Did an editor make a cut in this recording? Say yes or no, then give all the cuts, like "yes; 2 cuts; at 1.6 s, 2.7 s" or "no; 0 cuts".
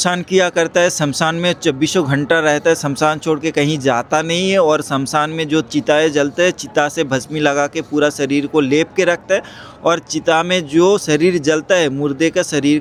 no; 0 cuts